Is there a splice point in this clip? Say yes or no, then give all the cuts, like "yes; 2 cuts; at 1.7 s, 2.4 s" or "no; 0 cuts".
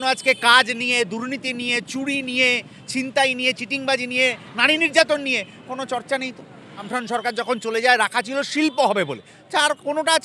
yes; 1 cut; at 6.9 s